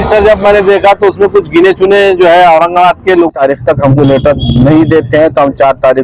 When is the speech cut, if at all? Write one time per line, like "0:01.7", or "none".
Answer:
0:03.3